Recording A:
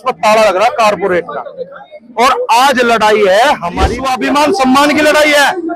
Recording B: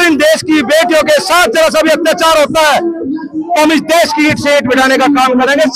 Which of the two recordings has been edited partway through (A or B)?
A